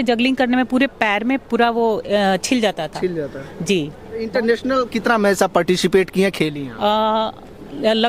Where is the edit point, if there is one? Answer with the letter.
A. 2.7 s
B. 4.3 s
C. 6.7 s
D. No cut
B